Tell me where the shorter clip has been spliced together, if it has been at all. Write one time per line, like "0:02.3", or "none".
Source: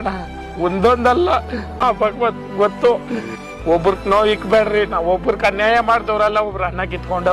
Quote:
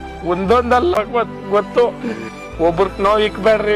0:00.9